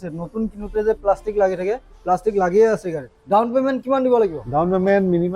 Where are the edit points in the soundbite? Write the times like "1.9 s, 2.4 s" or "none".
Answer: 3.1 s

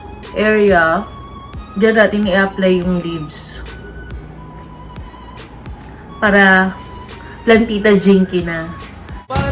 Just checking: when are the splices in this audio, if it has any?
none

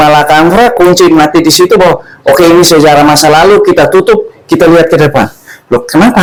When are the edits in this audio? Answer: none

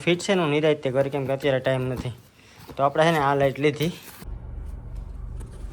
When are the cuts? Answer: 4.1 s

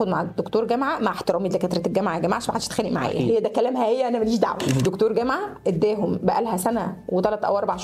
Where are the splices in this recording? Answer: 4.8 s

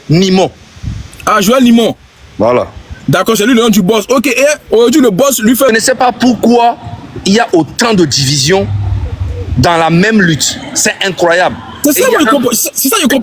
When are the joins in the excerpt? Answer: 5.7 s

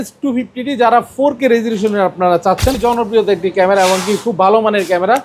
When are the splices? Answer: 2.8 s

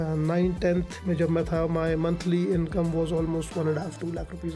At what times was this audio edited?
0.9 s

